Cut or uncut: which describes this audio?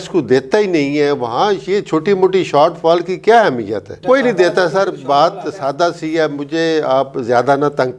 uncut